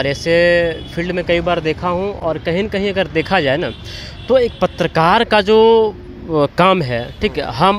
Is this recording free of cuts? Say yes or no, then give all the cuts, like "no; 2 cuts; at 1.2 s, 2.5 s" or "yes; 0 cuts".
yes; 0 cuts